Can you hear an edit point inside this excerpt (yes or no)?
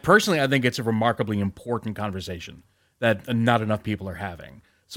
no